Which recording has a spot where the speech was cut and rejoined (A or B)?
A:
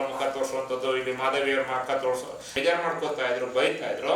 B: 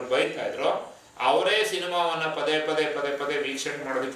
A